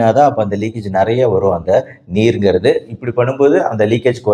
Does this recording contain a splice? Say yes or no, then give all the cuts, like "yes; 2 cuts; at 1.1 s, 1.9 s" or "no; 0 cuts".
no; 0 cuts